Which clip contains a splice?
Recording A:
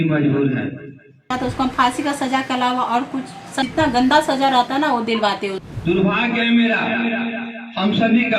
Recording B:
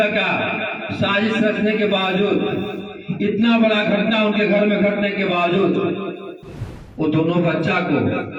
A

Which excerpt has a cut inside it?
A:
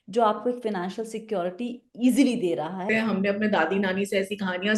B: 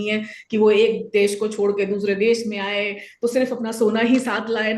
A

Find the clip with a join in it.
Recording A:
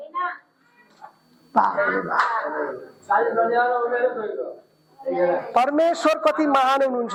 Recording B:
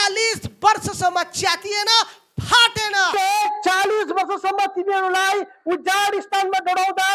B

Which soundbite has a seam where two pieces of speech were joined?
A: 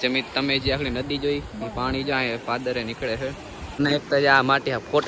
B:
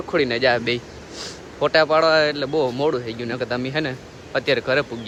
A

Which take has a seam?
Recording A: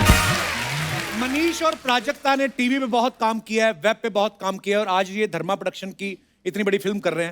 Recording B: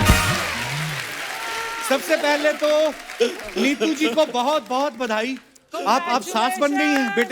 A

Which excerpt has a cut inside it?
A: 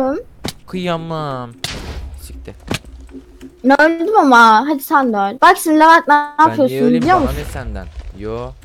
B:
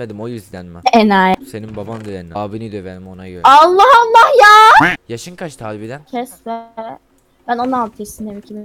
B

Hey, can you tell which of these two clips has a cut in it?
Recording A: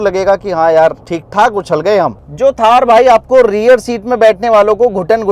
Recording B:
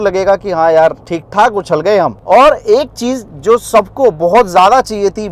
A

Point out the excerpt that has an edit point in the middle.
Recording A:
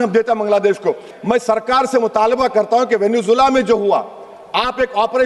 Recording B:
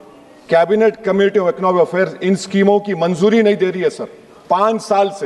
A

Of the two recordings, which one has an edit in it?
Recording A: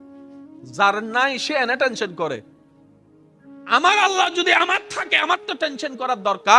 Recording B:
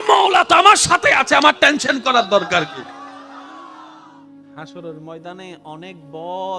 B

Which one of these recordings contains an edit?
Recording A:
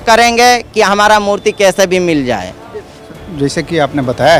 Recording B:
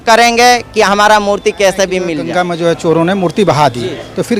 B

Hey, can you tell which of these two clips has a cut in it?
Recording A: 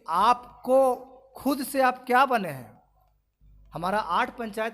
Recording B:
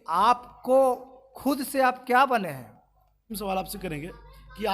B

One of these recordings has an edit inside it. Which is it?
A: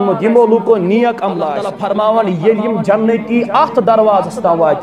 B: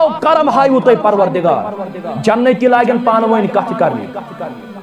A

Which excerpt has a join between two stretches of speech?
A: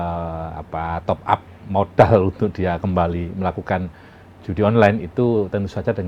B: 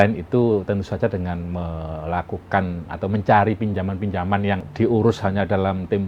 B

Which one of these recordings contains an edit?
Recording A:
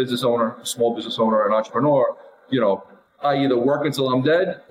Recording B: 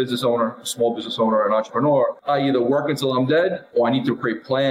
B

